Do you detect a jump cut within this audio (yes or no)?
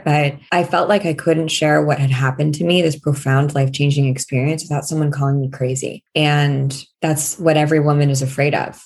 no